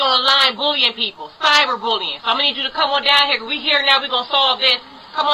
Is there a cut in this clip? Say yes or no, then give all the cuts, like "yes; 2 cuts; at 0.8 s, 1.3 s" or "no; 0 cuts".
no; 0 cuts